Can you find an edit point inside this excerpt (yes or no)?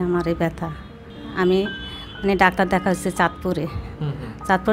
yes